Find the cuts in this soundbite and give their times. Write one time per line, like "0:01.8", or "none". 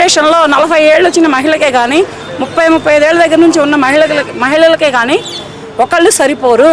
none